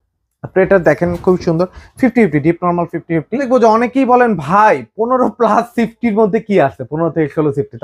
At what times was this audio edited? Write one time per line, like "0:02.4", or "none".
0:03.4